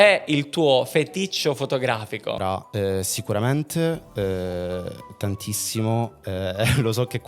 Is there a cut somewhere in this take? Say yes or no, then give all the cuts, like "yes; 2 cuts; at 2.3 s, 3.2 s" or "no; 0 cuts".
yes; 1 cut; at 2.4 s